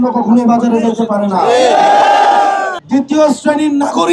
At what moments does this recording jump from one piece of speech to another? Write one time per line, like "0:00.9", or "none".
0:02.8